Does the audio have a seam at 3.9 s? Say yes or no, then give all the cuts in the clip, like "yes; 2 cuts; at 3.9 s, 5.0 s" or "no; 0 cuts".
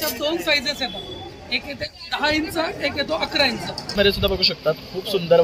yes; 1 cut; at 3.9 s